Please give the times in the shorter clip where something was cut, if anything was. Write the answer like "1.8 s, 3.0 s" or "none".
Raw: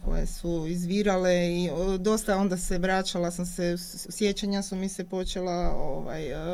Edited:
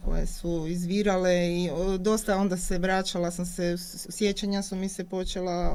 none